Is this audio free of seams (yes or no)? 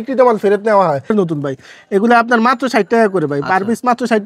no